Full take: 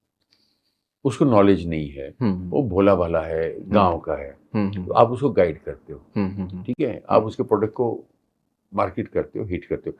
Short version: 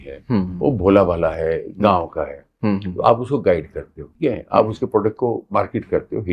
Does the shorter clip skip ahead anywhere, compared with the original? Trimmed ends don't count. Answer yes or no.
yes